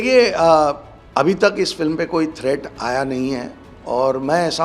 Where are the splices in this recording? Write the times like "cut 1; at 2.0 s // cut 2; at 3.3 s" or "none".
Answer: cut 1; at 0.9 s